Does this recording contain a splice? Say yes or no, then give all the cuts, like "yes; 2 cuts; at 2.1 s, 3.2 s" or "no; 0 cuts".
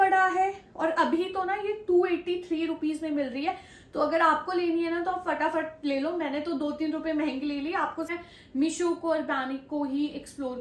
yes; 1 cut; at 8.1 s